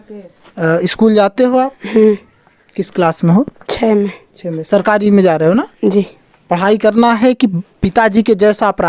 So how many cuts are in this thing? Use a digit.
0